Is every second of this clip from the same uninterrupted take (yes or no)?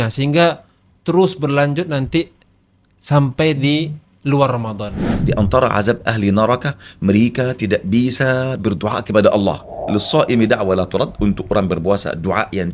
no